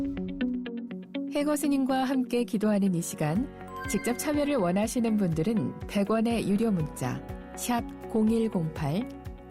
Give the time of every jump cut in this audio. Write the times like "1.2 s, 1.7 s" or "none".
1.3 s

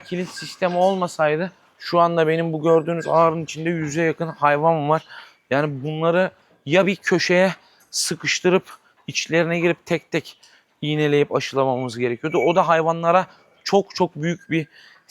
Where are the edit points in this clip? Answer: none

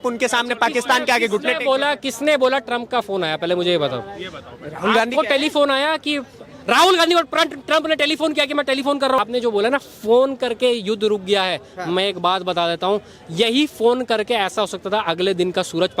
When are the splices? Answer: 9.2 s

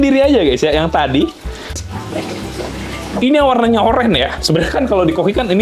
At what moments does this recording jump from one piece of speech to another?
1.8 s

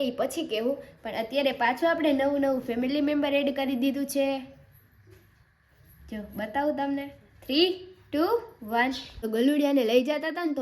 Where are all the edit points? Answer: 9.1 s

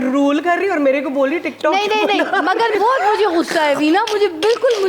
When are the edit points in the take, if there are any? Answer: 2.7 s

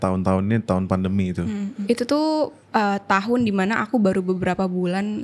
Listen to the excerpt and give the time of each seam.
1.8 s, 2.6 s

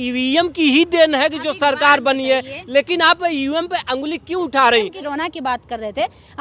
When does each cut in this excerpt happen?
5.0 s

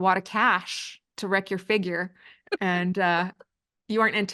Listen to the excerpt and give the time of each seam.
1.1 s

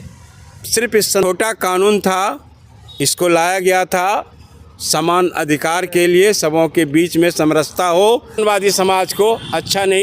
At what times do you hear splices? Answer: 1.2 s, 8.4 s

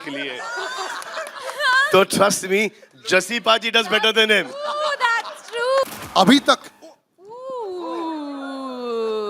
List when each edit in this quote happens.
6.0 s

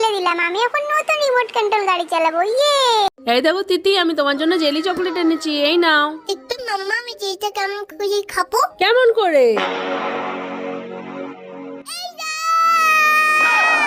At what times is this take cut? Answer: none

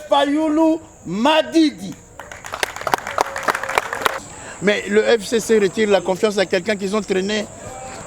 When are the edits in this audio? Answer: 4.2 s

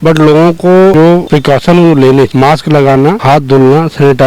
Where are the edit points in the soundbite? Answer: 1.1 s, 2.3 s, 3.2 s

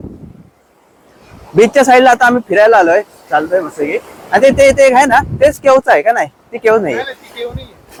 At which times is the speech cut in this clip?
none

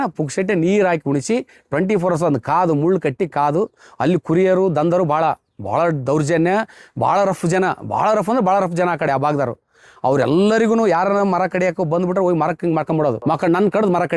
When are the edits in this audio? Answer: 13.2 s

